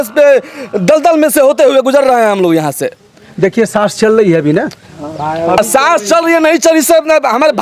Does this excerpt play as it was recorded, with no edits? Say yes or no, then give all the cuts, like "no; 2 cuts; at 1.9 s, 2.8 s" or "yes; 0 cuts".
yes; 0 cuts